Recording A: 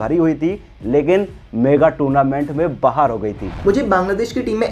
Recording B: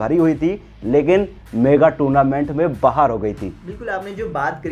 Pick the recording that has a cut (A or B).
A